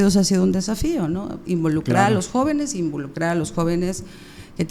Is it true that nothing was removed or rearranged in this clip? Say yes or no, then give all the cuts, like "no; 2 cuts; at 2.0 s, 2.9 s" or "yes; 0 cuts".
yes; 0 cuts